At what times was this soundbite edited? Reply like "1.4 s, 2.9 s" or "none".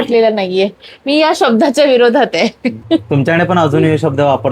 2.8 s